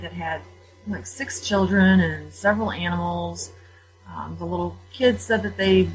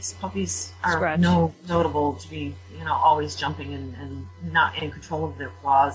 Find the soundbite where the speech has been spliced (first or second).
second